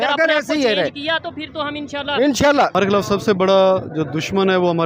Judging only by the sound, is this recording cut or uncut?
cut